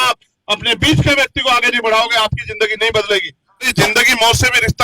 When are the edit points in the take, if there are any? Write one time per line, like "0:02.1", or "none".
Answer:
0:03.7